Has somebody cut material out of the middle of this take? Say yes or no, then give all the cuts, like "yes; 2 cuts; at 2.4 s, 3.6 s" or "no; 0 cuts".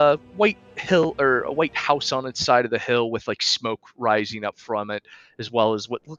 no; 0 cuts